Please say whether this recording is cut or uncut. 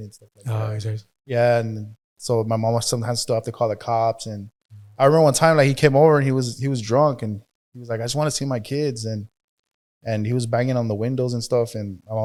uncut